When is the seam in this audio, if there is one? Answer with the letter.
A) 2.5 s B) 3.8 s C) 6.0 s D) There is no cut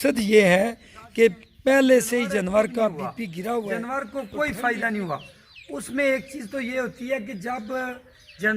B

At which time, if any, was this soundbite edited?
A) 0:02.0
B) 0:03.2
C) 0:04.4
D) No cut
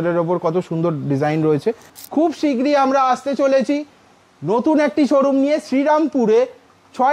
A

